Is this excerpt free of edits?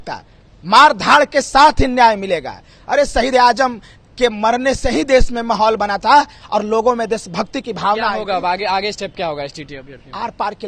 yes; 0 cuts

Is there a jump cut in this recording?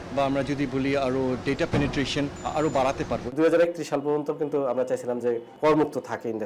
yes; 3 cuts; at 2.4 s, 3.3 s, 5.5 s

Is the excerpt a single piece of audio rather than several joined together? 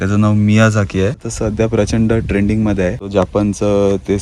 no; 2 cuts; at 1.3 s, 3.1 s

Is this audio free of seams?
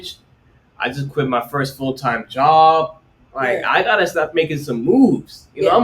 no; 1 cut; at 4.1 s

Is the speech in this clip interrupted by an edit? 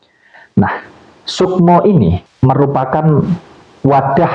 yes; 1 cut; at 2.3 s

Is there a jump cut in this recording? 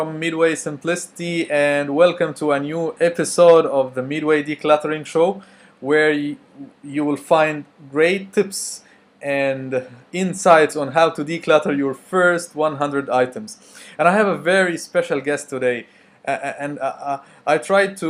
no; 0 cuts

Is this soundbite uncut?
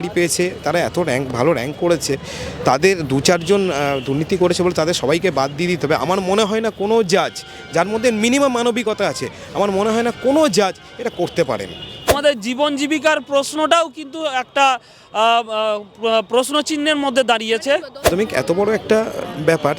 no; 2 cuts; at 12.1 s, 18.1 s

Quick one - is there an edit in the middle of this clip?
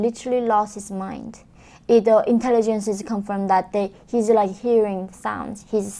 no; 0 cuts

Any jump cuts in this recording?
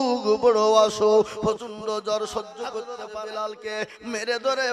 yes; 1 cut; at 2.9 s

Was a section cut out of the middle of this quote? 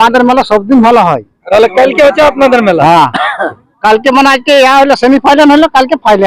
yes; 1 cut; at 1.5 s

